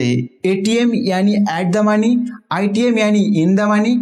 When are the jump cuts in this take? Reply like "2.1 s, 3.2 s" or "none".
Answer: none